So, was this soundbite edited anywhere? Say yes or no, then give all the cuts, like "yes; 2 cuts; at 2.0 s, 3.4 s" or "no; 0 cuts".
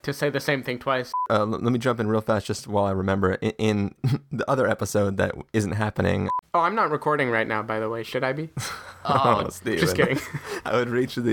yes; 3 cuts; at 1.2 s, 4.0 s, 6.5 s